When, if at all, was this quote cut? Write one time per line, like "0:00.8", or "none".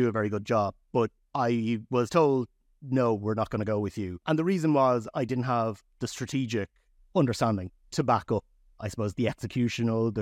0:01.2
0:04.2
0:07.0
0:08.7